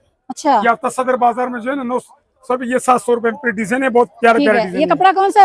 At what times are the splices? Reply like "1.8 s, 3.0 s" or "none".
none